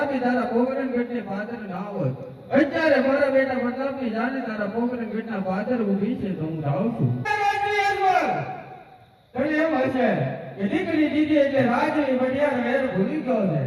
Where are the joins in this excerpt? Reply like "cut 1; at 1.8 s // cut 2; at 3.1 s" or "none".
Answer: cut 1; at 7.3 s